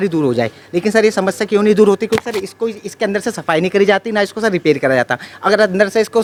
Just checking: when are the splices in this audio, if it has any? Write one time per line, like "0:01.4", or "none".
none